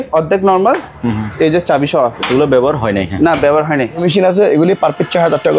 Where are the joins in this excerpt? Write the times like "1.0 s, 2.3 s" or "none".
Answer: 4.0 s